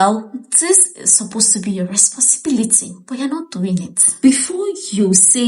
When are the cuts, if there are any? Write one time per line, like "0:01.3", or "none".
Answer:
0:04.2